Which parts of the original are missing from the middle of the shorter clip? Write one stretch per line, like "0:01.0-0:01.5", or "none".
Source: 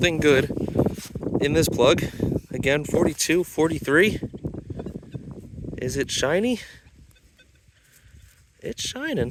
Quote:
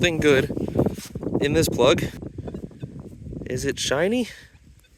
0:02.1-0:04.4